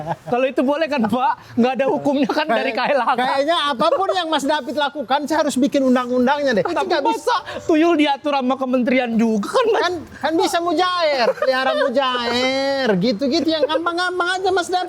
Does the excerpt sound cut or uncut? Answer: cut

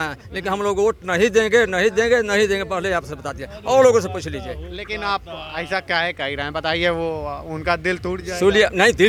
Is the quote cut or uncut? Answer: uncut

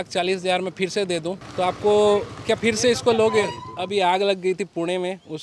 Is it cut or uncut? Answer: cut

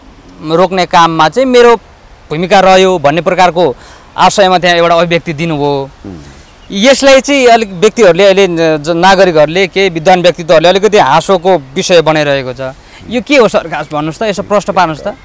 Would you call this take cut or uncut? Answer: uncut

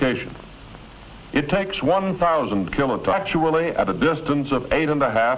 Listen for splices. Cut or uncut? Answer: uncut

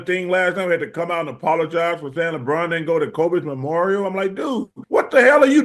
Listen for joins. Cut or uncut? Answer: cut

